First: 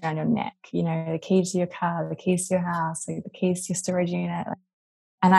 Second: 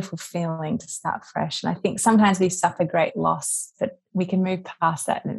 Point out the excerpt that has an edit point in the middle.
first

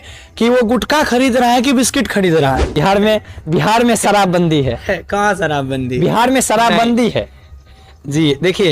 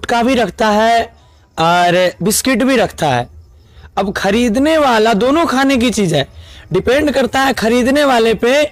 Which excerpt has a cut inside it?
first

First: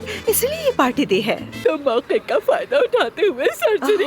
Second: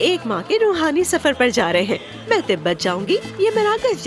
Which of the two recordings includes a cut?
first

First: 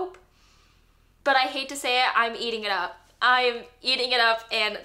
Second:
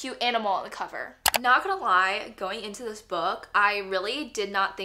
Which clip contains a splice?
second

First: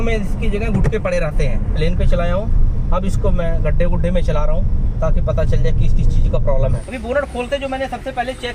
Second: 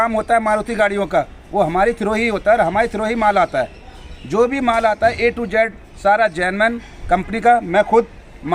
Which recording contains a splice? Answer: first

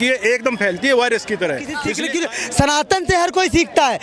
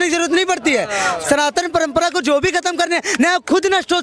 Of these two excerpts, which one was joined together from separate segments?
first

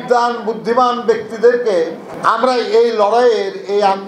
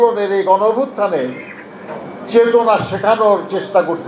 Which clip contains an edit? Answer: first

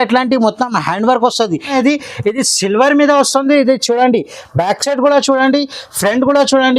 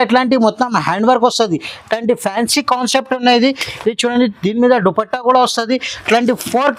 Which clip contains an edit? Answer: first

